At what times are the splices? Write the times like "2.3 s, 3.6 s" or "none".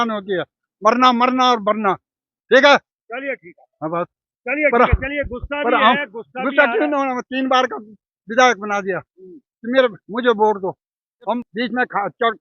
11.5 s